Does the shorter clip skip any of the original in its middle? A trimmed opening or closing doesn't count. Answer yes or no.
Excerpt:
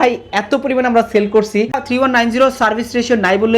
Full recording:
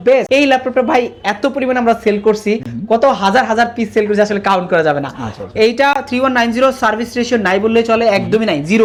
yes